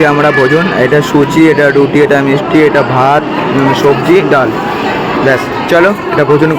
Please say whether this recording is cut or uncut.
uncut